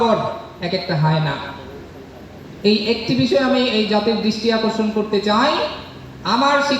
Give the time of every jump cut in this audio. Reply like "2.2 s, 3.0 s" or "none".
none

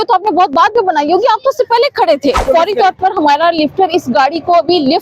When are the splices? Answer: 2.4 s

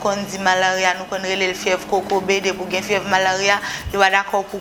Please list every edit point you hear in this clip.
none

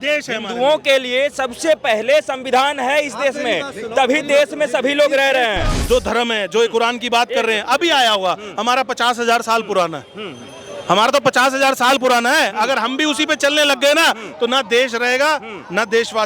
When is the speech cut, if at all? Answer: 5.8 s

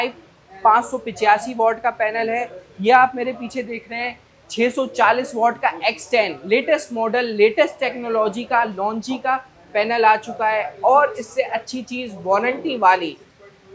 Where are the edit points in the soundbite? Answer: none

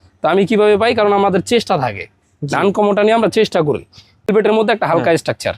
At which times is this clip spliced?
4.3 s

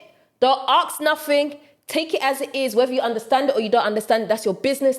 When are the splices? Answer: none

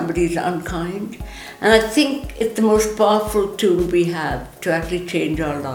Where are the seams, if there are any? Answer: none

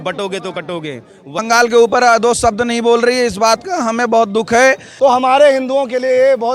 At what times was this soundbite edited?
1.3 s, 4.9 s

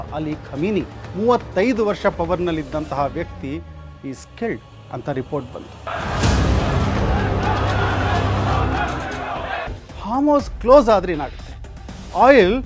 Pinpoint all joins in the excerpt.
5.9 s, 9.6 s

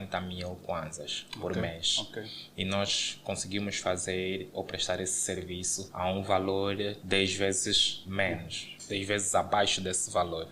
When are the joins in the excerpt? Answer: none

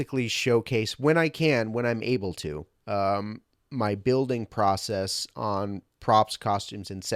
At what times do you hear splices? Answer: none

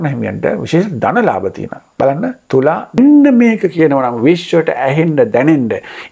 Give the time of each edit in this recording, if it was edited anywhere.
3.0 s

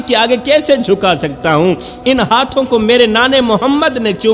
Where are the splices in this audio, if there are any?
none

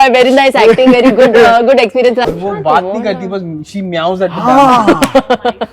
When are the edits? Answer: 2.2 s

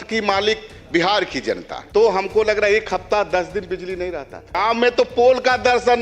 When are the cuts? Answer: 1.7 s, 4.6 s

